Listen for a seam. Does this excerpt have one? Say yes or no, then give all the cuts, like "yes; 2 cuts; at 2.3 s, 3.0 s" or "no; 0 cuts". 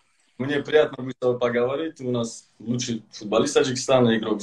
yes; 1 cut; at 1.1 s